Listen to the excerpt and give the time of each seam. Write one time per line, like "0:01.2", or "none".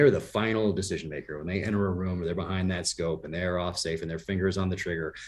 none